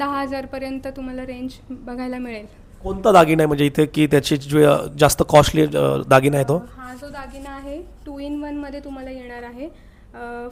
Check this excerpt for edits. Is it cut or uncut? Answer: uncut